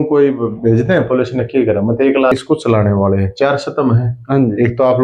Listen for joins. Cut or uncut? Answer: cut